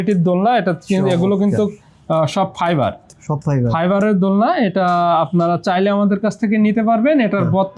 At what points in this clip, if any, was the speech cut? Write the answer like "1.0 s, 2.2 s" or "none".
none